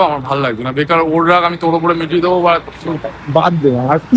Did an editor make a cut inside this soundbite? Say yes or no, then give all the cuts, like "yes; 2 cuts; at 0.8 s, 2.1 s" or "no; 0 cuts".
no; 0 cuts